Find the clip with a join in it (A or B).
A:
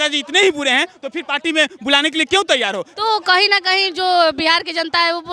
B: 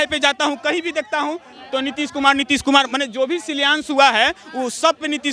A